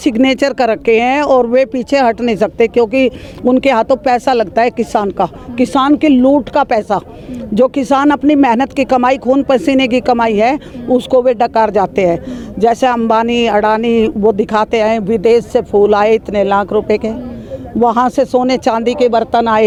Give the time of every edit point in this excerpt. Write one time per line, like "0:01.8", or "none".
none